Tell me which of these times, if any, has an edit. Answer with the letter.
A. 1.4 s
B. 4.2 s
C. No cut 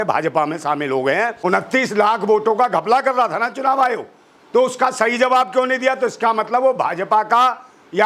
A